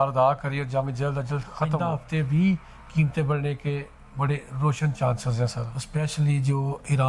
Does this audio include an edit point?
yes; 2 cuts; at 1.7 s, 5.7 s

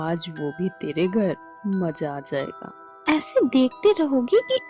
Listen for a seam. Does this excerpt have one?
no; 0 cuts

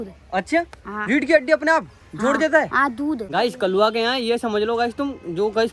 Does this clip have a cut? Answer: yes; 1 cut; at 3.2 s

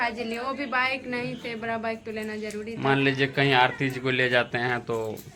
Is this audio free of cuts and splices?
yes; 0 cuts

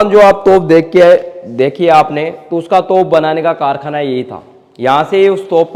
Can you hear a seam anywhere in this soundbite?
no; 0 cuts

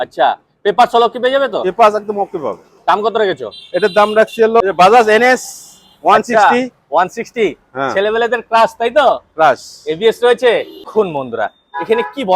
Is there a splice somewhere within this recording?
yes; 2 cuts; at 4.6 s, 10.9 s

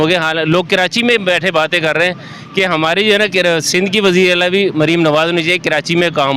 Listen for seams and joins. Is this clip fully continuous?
yes; 0 cuts

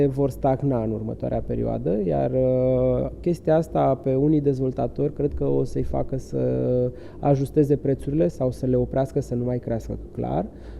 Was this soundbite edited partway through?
no; 0 cuts

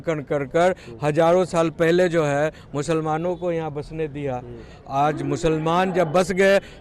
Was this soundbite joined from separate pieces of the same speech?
no; 0 cuts

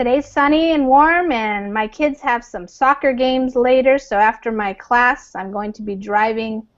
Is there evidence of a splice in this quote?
yes; 1 cut; at 3.4 s

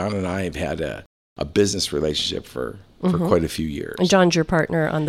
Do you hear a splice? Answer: no; 0 cuts

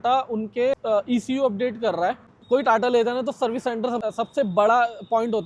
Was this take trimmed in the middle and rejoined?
yes; 3 cuts; at 0.8 s, 2.4 s, 4.0 s

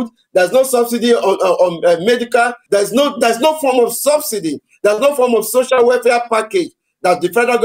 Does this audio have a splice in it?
yes; 1 cut; at 2.6 s

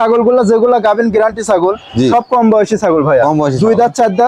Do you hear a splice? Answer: no; 0 cuts

